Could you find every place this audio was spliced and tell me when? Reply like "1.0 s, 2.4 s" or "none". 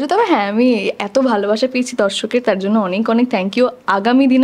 none